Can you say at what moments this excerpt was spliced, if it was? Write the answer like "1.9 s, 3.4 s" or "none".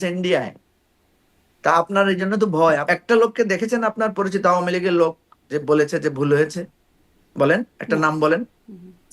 2.8 s